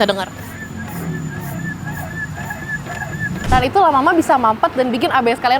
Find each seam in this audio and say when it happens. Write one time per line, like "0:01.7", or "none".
0:03.4